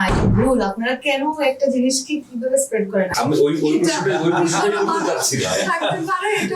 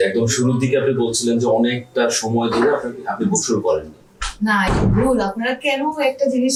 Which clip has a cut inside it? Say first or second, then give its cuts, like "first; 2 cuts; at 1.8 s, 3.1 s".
first; 1 cut; at 3.1 s